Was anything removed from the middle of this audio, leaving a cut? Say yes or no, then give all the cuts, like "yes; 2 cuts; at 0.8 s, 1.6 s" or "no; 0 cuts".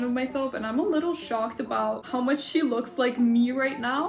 no; 0 cuts